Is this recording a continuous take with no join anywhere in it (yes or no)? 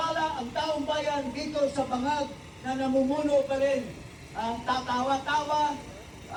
yes